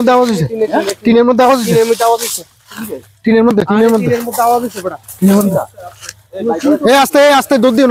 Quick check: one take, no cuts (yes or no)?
yes